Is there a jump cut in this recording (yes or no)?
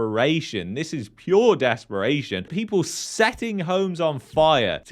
yes